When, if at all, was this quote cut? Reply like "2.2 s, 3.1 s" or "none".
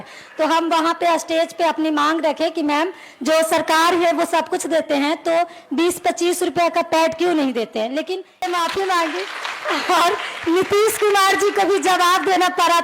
8.4 s